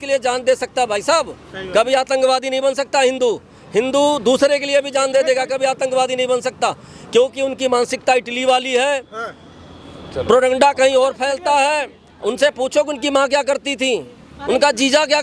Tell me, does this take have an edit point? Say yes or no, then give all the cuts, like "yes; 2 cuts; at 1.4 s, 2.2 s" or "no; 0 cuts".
no; 0 cuts